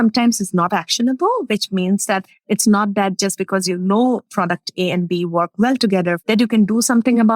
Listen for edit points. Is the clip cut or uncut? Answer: cut